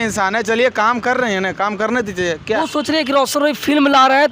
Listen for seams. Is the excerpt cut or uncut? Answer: cut